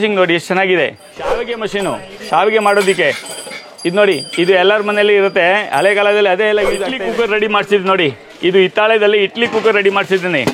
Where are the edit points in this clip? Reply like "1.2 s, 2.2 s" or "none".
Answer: 1.4 s, 6.9 s